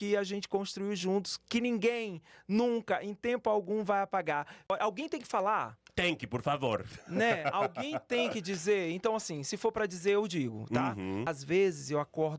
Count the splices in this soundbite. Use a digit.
2